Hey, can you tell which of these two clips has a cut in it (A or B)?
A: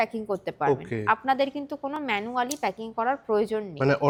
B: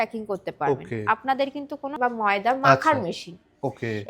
B